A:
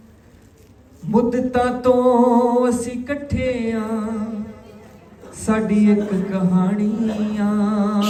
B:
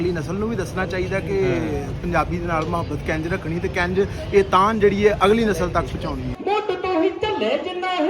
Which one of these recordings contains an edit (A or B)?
B